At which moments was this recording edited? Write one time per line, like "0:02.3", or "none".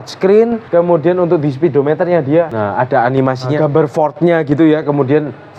0:03.5